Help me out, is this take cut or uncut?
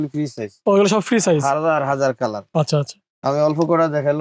uncut